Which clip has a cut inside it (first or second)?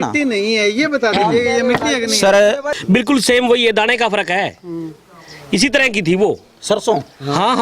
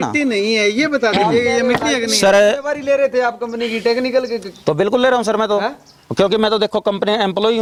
first